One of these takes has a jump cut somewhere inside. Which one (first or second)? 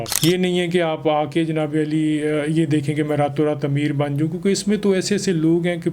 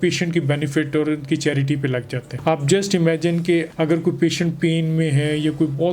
second